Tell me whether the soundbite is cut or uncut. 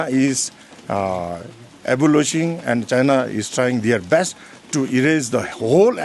uncut